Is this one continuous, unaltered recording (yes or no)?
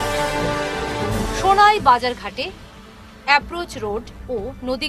no